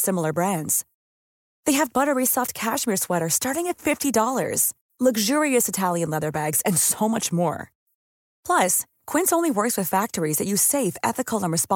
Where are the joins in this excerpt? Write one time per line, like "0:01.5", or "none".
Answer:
none